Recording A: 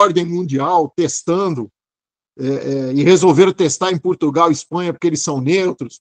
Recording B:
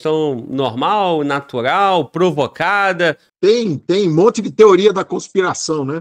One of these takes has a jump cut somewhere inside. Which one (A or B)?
B